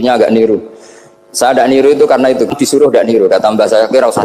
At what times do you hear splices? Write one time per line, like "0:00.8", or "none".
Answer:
0:02.4

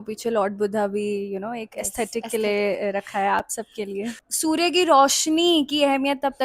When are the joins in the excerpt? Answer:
0:04.3

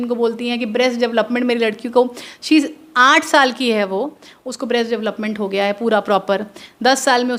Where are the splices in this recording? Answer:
none

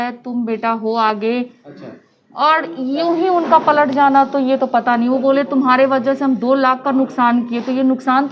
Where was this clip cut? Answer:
none

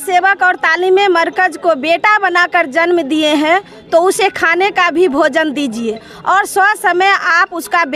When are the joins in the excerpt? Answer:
none

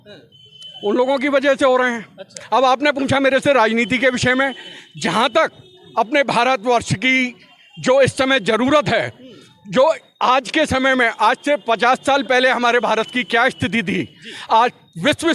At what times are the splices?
none

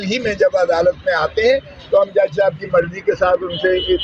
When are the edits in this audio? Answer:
none

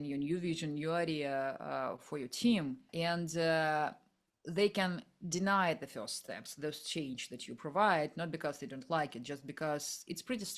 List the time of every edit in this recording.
0:02.9

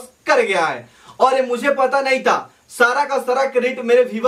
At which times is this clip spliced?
none

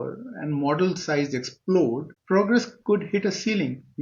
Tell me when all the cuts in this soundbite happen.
0:02.1

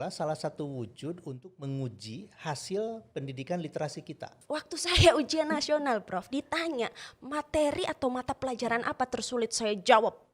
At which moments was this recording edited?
0:04.3

